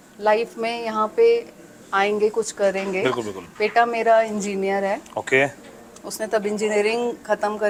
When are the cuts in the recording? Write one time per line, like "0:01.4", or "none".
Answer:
none

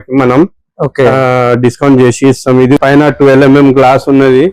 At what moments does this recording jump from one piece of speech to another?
0:02.8

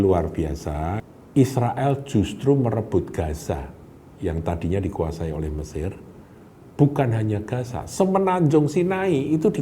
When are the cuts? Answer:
0:01.0

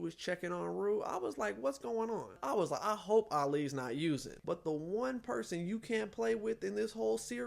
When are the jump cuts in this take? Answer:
0:02.4
0:04.3

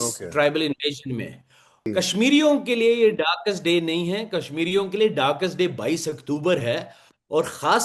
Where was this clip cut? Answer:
0:01.9

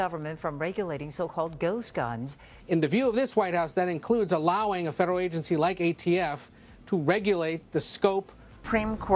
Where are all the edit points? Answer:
none

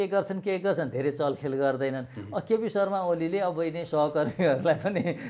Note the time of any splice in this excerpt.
none

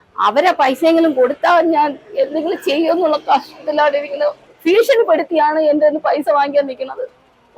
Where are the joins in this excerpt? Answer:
0:04.5

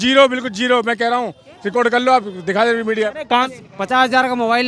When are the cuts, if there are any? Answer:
0:03.7

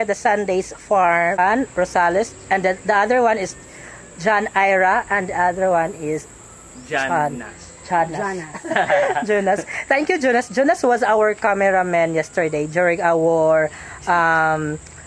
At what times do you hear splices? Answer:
0:01.4

